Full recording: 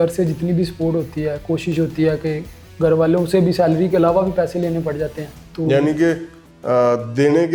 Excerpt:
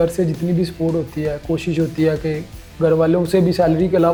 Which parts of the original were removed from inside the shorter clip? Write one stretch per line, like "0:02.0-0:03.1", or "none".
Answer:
none